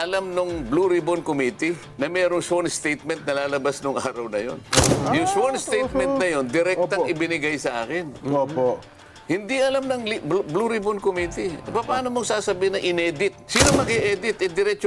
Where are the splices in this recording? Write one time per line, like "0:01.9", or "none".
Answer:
0:01.9
0:04.6
0:13.4